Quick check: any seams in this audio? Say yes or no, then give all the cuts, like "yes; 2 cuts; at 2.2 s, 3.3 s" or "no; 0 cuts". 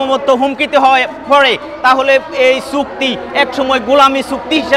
no; 0 cuts